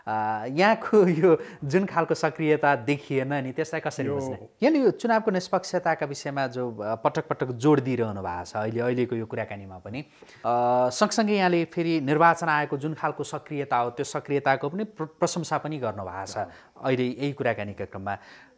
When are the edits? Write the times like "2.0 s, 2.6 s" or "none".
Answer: 4.4 s, 10.3 s